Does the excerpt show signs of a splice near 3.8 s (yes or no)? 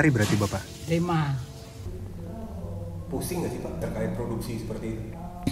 yes